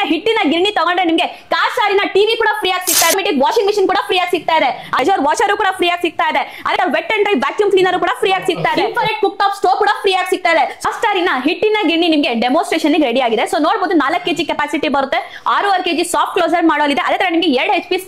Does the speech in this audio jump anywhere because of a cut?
yes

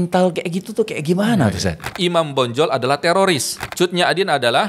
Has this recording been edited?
yes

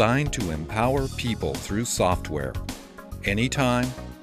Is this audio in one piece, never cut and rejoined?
yes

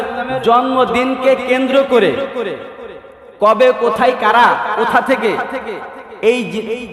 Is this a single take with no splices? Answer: yes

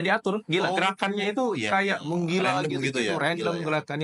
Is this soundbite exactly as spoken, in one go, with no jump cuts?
yes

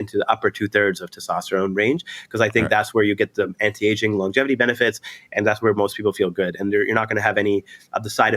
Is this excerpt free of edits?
yes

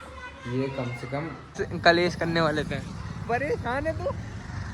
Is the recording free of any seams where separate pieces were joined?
no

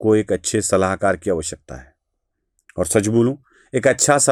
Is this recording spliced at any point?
no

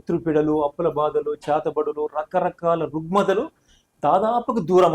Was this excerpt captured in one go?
yes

